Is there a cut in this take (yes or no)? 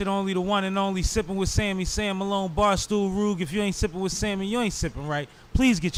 no